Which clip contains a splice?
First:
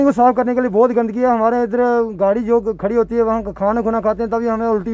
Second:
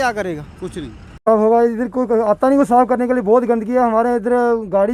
second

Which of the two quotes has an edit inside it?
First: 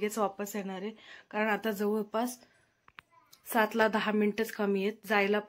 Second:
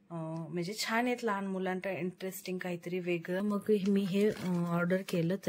second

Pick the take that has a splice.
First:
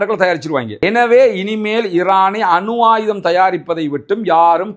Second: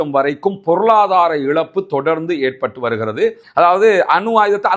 second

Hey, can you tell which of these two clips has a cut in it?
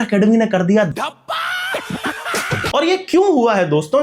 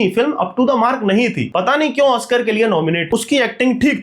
second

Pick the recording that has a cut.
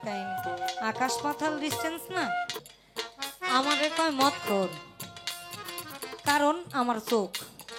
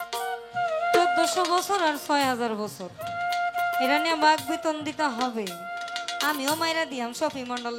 first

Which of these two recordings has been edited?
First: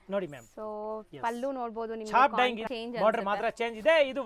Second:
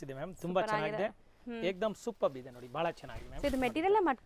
first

